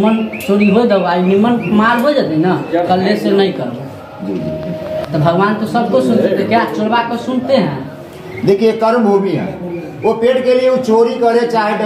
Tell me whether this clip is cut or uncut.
uncut